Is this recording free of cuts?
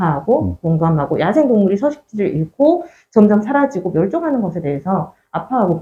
yes; 0 cuts

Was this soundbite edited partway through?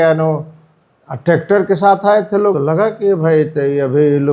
yes; 1 cut; at 2.6 s

